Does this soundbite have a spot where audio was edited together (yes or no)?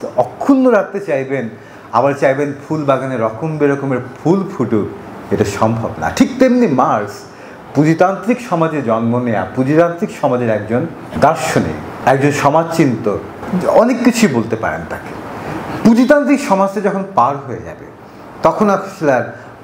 no